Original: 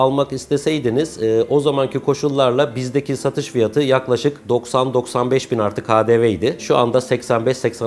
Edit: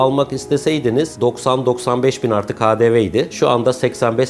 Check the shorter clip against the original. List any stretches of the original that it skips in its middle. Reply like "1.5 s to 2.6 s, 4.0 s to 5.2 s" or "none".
1.1 s to 4.4 s